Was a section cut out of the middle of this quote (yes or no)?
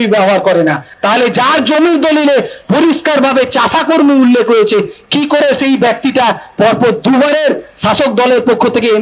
no